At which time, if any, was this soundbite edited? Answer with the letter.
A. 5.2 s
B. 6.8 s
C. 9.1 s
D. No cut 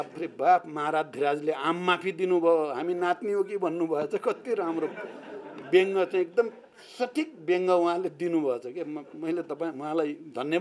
D